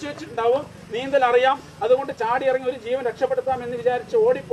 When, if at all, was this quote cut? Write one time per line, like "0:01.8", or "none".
none